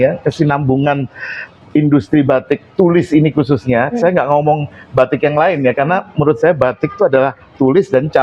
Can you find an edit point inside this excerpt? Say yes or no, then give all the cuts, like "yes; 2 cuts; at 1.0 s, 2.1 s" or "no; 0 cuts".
no; 0 cuts